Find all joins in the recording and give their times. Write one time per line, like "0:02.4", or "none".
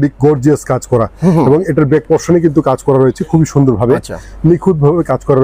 none